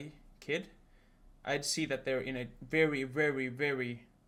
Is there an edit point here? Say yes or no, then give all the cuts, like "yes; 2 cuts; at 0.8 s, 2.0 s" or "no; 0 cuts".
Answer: no; 0 cuts